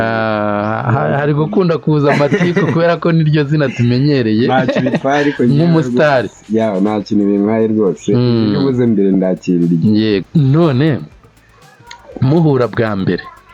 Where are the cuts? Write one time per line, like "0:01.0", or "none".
0:10.2